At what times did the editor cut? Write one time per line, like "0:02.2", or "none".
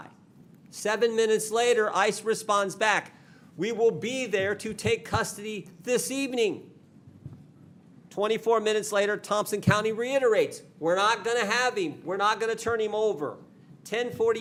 none